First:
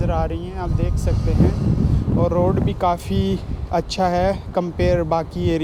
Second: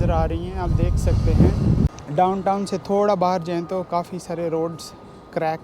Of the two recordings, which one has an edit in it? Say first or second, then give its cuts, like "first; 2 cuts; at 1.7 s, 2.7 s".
second; 1 cut; at 2.0 s